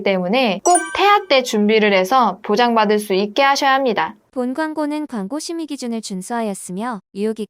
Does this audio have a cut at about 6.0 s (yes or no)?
no